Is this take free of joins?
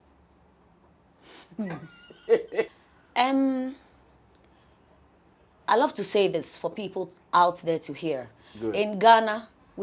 no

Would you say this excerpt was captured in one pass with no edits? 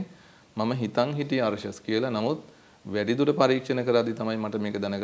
yes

